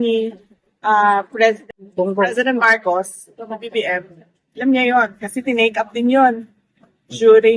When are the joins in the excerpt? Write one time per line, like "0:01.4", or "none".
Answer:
0:01.6